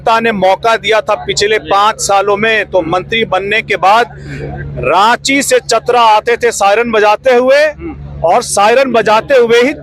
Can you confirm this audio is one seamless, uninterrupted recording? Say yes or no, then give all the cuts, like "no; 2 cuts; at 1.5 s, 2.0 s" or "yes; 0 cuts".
yes; 0 cuts